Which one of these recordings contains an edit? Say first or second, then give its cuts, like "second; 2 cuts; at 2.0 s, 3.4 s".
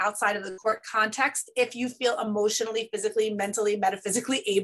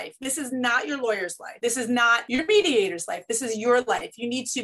second; 2 cuts; at 1.4 s, 2.2 s